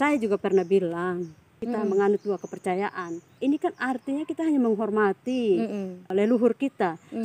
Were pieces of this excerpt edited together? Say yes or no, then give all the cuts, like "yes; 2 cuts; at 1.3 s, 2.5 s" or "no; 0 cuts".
yes; 3 cuts; at 1.6 s, 3.3 s, 6.1 s